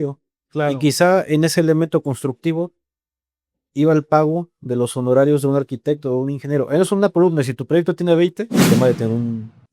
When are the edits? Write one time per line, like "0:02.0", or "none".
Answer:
0:08.6